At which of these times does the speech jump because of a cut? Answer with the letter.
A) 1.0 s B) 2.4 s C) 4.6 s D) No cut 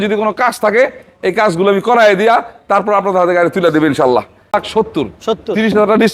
C